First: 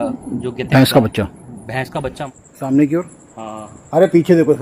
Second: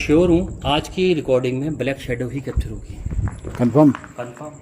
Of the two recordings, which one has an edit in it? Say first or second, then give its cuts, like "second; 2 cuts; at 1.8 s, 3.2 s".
first; 1 cut; at 2.2 s